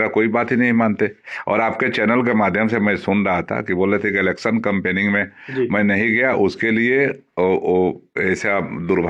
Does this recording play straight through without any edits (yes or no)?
yes